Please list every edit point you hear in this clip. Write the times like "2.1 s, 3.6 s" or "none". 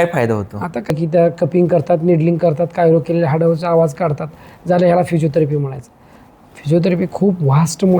1.0 s